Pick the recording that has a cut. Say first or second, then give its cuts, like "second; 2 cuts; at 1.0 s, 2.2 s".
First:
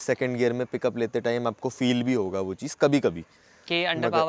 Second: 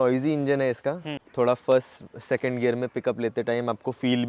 second; 1 cut; at 1.2 s